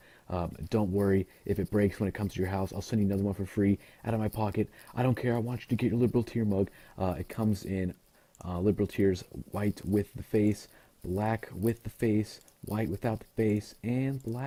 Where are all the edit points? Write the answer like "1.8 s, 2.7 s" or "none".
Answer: none